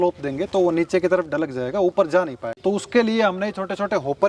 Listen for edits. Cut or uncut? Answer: cut